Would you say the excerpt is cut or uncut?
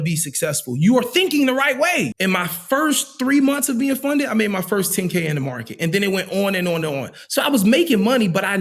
cut